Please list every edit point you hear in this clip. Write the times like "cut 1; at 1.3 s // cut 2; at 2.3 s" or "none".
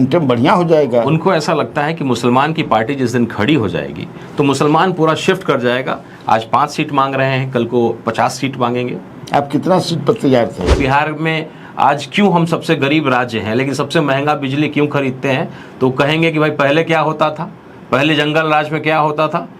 cut 1; at 10.7 s